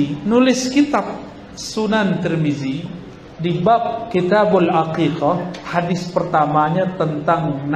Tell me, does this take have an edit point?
no; 0 cuts

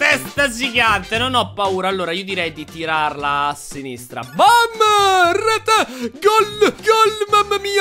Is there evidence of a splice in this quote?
no; 0 cuts

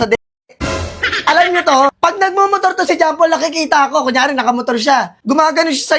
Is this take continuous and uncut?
no; 2 cuts; at 1.9 s, 5.1 s

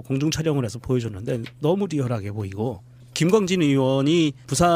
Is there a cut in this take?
no; 0 cuts

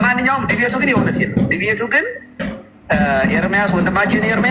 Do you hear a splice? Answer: no; 0 cuts

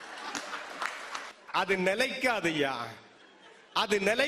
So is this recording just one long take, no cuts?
no; 1 cut; at 1.3 s

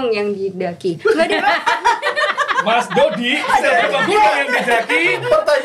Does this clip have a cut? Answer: no; 0 cuts

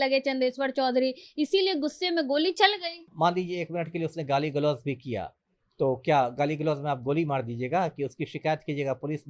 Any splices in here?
yes; 1 cut; at 3.1 s

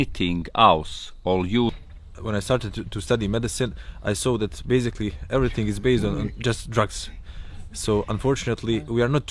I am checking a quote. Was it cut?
yes; 1 cut; at 1.7 s

